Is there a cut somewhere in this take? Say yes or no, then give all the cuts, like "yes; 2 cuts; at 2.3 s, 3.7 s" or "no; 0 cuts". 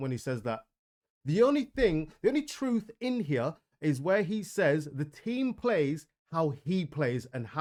no; 0 cuts